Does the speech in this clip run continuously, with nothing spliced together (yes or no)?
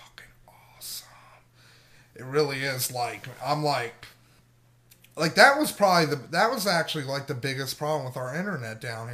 yes